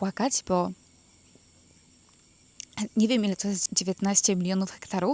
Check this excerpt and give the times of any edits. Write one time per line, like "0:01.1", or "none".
0:03.7